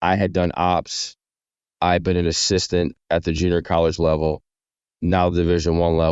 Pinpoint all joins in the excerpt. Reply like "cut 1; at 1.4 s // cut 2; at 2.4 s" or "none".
none